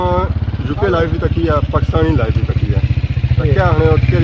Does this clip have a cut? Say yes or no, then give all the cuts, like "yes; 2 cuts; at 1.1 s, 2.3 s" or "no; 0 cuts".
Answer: no; 0 cuts